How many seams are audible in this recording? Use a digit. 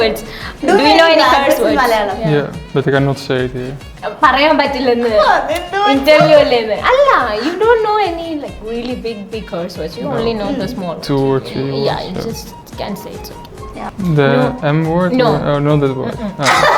1